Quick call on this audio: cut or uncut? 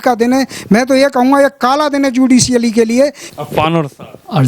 cut